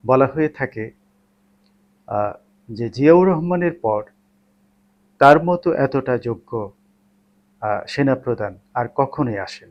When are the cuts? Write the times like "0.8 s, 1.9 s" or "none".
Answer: none